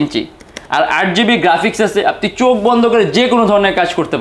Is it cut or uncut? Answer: uncut